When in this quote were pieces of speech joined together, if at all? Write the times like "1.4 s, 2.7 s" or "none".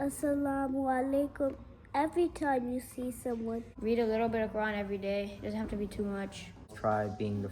3.7 s, 6.7 s